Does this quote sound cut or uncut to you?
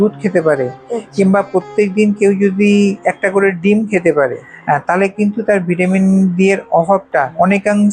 uncut